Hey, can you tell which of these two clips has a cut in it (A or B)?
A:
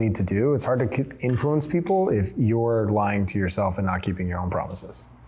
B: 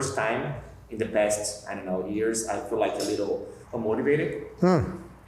B